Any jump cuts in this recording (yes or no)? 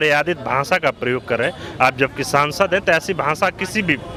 no